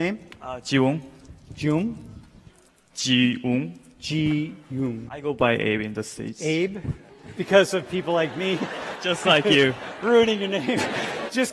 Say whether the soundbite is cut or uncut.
uncut